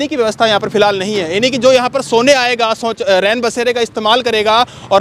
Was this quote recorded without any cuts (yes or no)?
yes